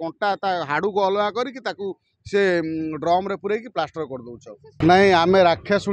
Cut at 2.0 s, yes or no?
no